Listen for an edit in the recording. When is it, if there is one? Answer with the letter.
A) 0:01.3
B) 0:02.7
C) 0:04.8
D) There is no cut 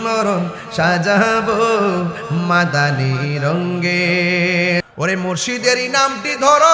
C